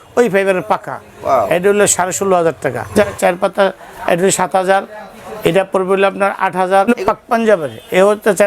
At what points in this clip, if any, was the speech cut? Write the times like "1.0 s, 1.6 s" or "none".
2.9 s, 6.9 s